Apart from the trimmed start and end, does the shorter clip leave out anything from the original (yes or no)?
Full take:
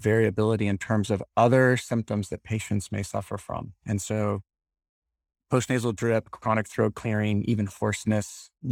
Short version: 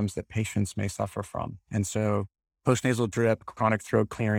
yes